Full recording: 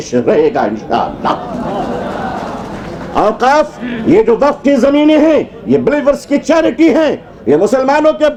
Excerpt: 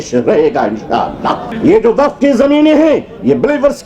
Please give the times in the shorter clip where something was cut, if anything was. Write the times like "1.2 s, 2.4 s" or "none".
1.5 s